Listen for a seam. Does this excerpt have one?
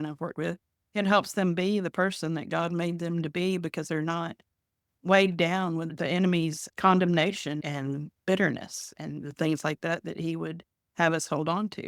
no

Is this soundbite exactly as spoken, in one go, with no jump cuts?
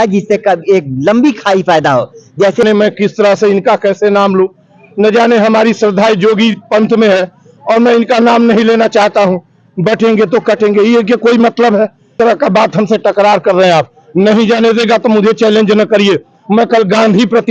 no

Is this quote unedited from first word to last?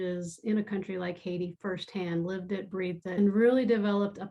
no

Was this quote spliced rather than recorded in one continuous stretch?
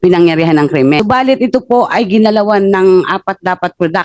yes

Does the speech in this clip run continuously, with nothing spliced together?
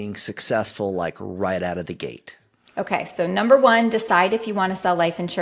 yes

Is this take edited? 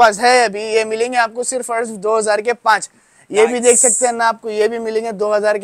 no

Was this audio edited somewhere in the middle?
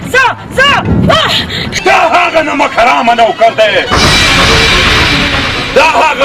yes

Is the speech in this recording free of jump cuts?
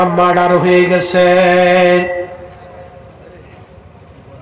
yes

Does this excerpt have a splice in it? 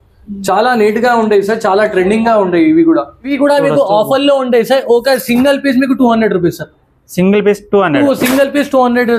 yes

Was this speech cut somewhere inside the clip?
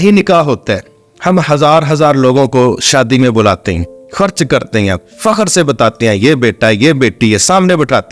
no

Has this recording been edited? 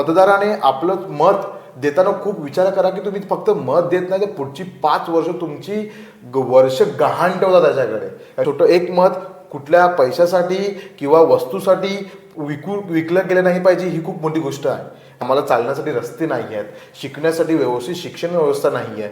yes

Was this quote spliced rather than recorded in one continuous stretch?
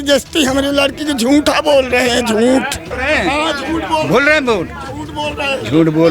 yes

